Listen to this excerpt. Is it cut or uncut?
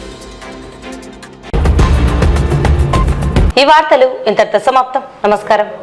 uncut